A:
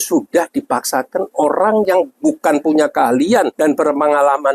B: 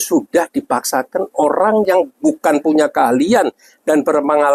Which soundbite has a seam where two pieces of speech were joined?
A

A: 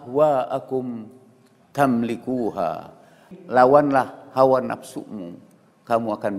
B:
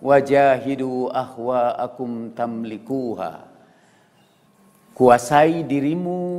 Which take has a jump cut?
A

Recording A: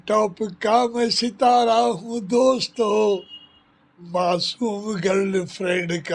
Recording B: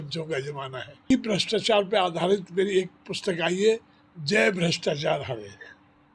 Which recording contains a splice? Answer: B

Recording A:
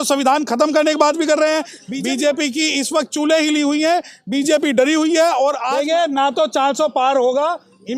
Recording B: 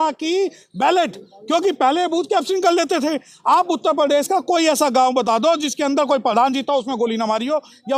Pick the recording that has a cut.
A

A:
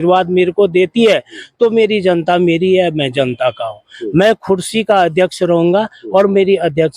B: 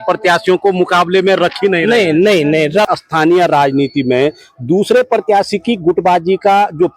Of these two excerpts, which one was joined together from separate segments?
B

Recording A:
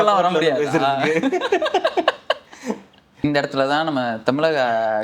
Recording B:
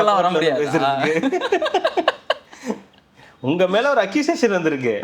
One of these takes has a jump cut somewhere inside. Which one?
A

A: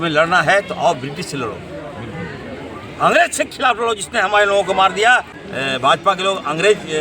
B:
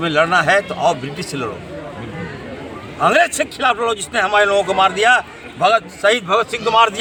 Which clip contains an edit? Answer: A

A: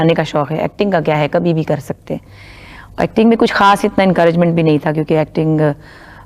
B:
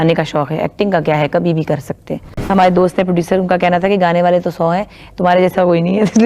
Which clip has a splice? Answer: B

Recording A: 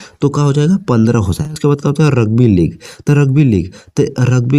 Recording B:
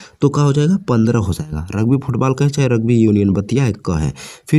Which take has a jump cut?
A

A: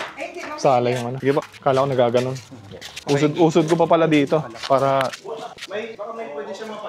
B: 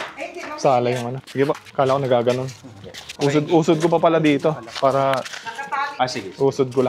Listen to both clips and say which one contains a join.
A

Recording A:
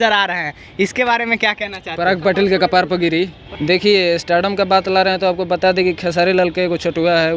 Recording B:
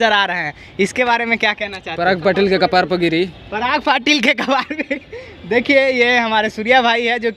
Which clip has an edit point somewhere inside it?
A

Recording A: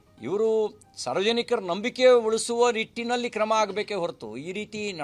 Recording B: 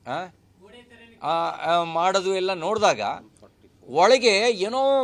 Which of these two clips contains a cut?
A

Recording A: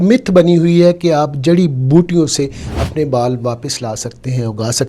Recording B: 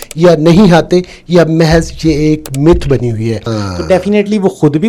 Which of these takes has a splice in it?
B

